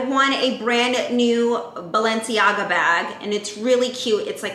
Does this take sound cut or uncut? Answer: uncut